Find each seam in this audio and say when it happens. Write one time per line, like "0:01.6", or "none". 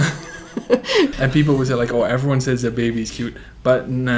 0:01.1